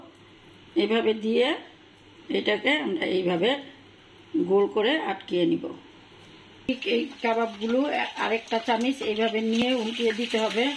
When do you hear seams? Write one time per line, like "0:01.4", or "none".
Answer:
0:06.7